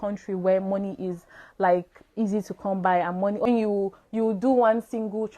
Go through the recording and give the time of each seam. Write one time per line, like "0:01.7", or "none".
0:03.5

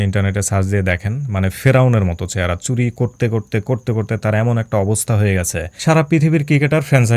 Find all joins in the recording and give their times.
0:05.6

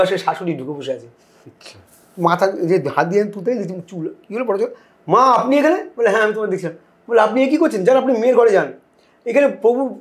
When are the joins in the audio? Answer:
none

